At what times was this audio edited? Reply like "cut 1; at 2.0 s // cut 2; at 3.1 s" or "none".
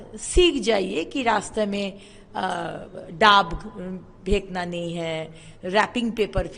none